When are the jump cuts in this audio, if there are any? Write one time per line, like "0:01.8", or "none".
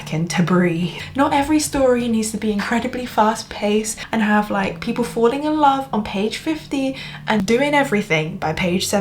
0:01.0
0:04.0
0:07.4